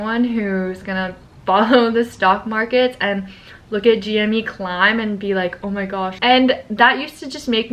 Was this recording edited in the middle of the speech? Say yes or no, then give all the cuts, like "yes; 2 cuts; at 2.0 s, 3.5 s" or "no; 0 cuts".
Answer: no; 0 cuts